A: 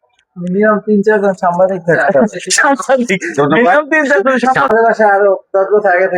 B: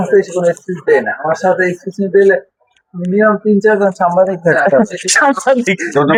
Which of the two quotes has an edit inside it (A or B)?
A